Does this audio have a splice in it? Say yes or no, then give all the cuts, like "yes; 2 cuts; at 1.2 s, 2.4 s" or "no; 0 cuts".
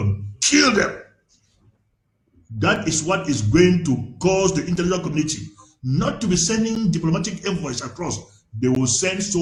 no; 0 cuts